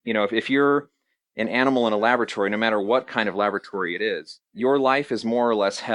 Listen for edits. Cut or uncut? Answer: cut